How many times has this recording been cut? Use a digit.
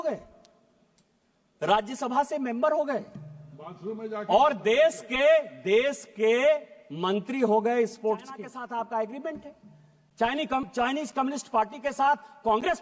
1